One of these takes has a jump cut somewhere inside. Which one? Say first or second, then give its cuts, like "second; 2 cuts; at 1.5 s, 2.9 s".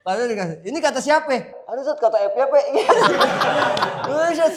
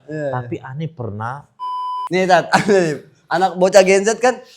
second; 1 cut; at 1.9 s